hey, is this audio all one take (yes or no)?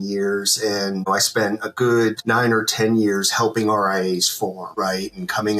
no